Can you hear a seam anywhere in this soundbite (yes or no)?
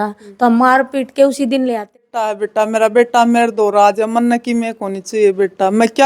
yes